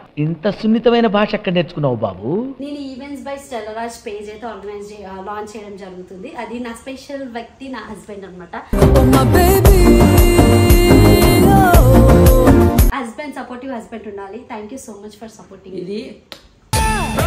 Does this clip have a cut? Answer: yes; 2 cuts; at 2.6 s, 12.9 s

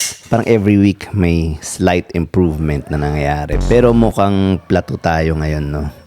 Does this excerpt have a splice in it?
yes; 1 cut; at 3.5 s

